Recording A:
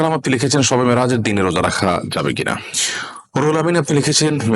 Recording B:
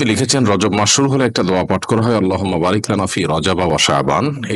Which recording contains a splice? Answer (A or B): A